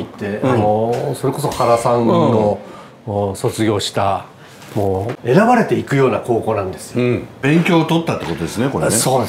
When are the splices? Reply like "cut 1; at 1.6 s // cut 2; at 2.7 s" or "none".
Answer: cut 1; at 5.1 s // cut 2; at 7.4 s